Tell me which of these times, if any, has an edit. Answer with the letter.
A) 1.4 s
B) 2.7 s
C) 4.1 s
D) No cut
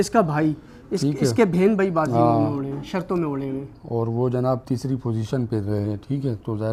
D